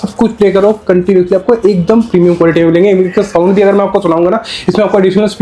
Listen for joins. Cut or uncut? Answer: uncut